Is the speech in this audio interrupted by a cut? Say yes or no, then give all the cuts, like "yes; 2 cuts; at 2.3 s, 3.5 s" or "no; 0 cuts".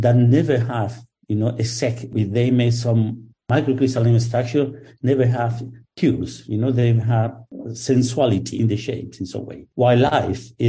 yes; 2 cuts; at 2.1 s, 8.5 s